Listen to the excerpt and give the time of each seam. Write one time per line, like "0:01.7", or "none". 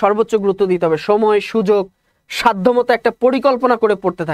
none